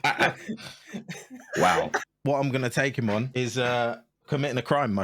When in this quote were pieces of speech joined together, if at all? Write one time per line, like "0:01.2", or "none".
0:02.1
0:03.3